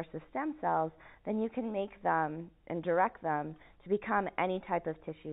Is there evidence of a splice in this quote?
no; 0 cuts

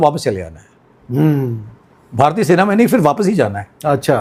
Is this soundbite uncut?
yes; 0 cuts

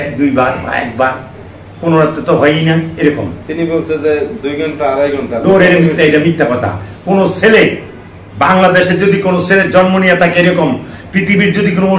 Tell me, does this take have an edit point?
no; 0 cuts

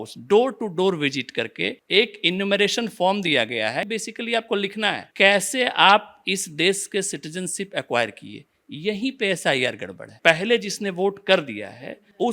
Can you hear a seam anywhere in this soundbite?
yes; 2 cuts; at 3.9 s, 10.0 s

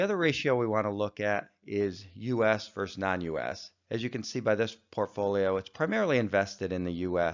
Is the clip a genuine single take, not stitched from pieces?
yes; 0 cuts

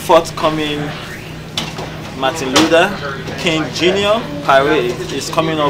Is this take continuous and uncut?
yes; 0 cuts

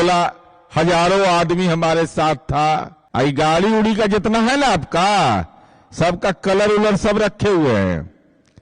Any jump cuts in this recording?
yes; 1 cut; at 3.0 s

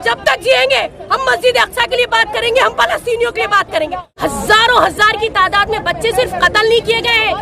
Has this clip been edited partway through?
yes; 1 cut; at 4.1 s

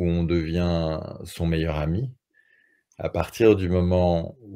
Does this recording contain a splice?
no; 0 cuts

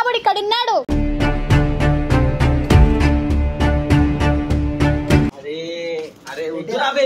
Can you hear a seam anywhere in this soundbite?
no; 0 cuts

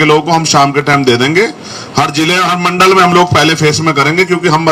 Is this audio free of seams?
yes; 0 cuts

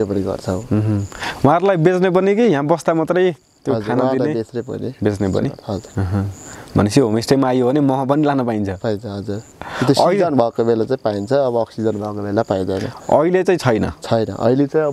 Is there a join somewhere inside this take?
no; 0 cuts

